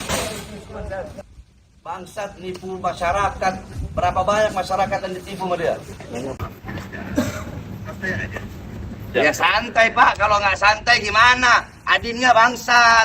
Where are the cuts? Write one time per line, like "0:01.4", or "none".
0:01.2
0:06.4